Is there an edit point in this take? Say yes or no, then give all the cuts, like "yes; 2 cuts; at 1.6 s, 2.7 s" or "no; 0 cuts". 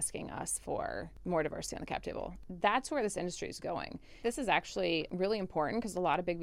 yes; 4 cuts; at 1.1 s, 2.4 s, 4.2 s, 5.1 s